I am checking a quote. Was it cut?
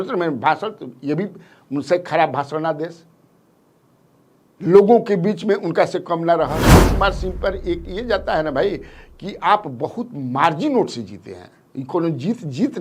yes; 1 cut; at 6.6 s

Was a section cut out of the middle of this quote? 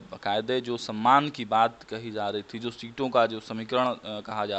no; 0 cuts

